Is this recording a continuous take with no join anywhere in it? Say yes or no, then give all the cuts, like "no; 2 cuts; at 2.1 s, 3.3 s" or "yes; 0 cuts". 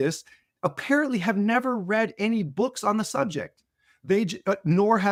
yes; 0 cuts